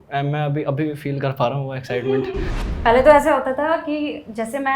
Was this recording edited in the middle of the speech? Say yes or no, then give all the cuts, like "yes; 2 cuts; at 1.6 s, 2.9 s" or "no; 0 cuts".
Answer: yes; 1 cut; at 2.6 s